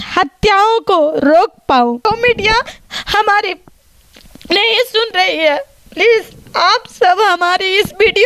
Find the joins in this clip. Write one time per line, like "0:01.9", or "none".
0:02.1